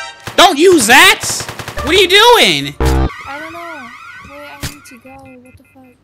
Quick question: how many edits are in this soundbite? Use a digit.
1